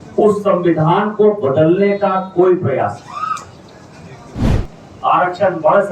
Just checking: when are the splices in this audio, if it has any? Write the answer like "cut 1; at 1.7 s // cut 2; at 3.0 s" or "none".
cut 1; at 4.5 s